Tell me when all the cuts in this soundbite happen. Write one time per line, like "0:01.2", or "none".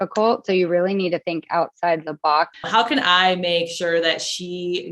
0:02.6